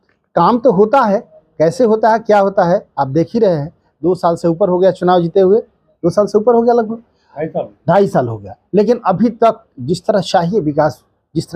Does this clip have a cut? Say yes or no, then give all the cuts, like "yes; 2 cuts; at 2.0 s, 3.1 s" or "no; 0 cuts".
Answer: yes; 1 cut; at 3.9 s